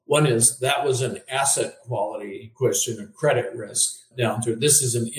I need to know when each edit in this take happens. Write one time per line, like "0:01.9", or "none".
0:02.4
0:04.1